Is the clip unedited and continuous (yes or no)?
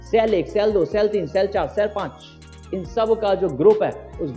yes